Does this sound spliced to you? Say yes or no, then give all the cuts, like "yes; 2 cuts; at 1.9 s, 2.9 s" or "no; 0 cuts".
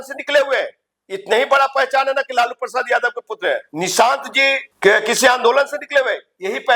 yes; 2 cuts; at 3.7 s, 4.7 s